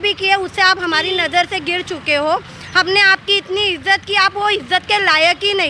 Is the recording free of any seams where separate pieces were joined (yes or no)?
yes